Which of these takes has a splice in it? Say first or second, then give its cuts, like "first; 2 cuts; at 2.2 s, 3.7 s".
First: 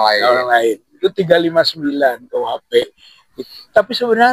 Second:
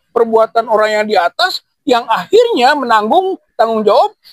first; 1 cut; at 3.3 s